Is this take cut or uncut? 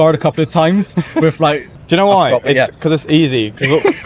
cut